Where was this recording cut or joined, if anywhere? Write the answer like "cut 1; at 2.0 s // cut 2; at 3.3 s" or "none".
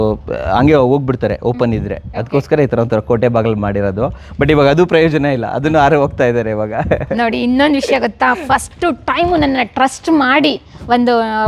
none